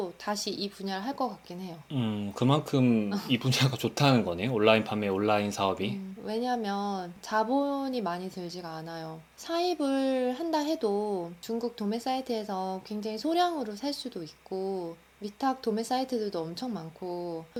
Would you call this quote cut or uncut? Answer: uncut